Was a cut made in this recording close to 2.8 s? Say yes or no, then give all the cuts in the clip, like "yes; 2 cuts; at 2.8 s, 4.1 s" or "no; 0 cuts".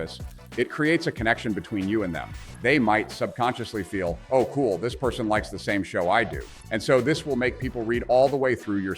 no; 1 cut; at 6.6 s